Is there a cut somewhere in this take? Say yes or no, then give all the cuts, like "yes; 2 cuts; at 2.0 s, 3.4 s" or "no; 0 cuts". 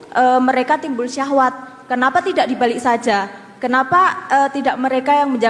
no; 0 cuts